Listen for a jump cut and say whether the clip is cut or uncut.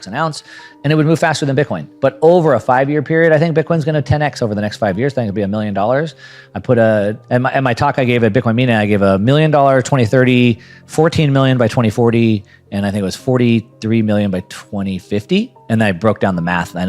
cut